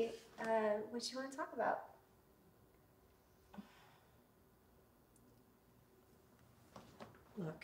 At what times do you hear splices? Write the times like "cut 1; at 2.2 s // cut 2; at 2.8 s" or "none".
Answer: none